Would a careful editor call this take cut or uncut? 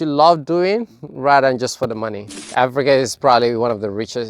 cut